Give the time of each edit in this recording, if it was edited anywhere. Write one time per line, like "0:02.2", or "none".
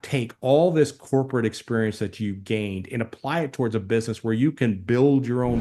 none